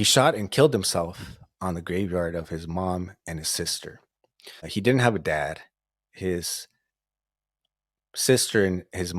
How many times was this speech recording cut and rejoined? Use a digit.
1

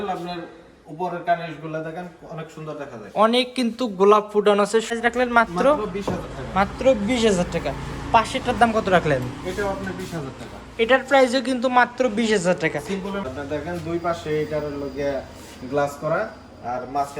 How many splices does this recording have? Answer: 2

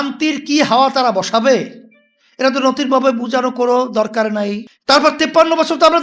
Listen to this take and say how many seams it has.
1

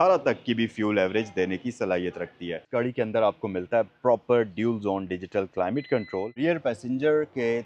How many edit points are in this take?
2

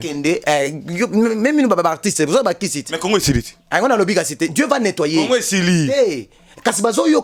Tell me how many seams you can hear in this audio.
0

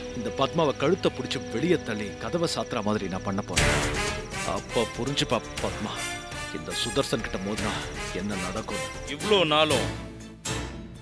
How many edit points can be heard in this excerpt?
1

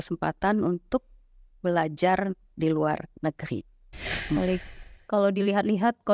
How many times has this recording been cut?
1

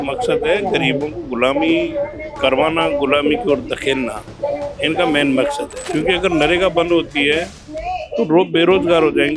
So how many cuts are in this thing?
1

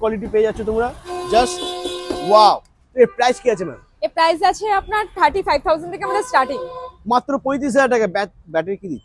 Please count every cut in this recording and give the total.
0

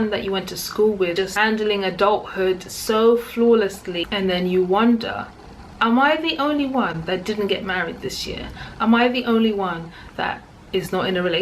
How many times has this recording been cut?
2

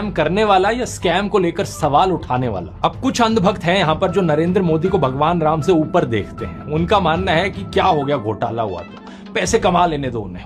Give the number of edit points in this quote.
0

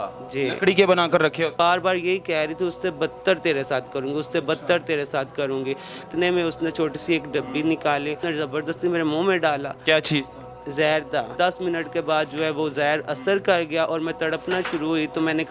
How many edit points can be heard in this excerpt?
4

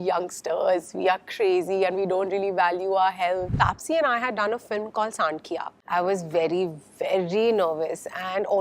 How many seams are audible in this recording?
2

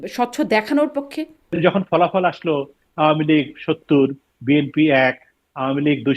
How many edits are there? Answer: 1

